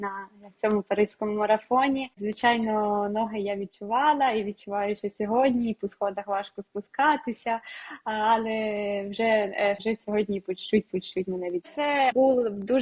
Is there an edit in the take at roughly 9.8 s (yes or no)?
yes